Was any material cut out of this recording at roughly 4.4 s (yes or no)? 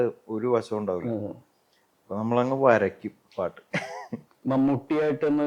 yes